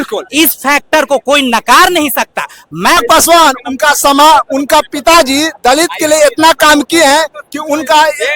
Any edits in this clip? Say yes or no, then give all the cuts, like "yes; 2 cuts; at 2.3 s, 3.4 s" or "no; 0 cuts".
yes; 1 cut; at 3.0 s